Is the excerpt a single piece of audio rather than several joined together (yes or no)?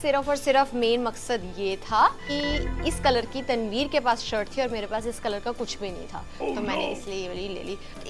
yes